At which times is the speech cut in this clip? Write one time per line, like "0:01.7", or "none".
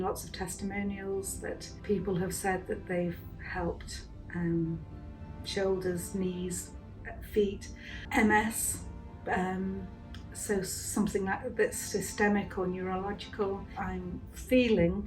0:01.7
0:08.1
0:13.8